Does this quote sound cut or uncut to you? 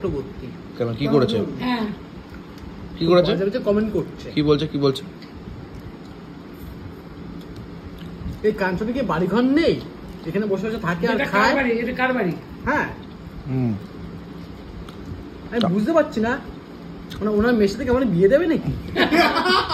uncut